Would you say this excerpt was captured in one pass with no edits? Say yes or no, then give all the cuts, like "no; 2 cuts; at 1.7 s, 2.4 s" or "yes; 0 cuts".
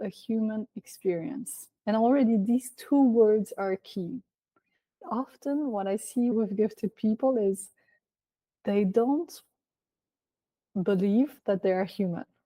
no; 3 cuts; at 4.9 s, 6.3 s, 11.4 s